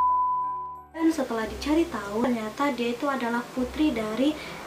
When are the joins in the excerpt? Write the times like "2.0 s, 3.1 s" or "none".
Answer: 1.0 s